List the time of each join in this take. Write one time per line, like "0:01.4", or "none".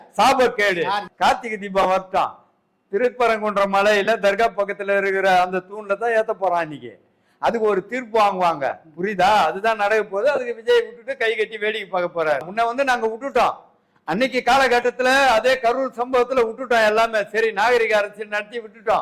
0:01.1
0:12.5